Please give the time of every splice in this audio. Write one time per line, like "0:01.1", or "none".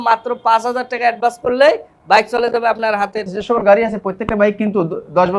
0:03.4